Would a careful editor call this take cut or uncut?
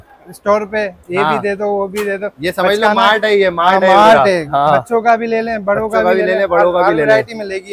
uncut